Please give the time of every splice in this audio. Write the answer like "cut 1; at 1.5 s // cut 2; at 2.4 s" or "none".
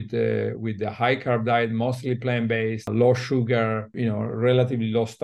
cut 1; at 2.9 s // cut 2; at 3.9 s